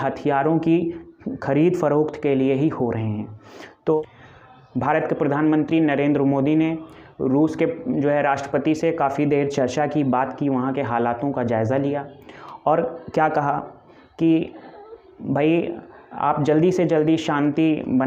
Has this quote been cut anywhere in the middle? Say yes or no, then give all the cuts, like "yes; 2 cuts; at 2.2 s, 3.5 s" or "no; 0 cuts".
yes; 1 cut; at 4.0 s